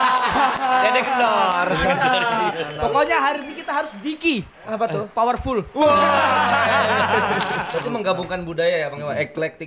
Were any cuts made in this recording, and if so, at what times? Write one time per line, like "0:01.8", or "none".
0:07.6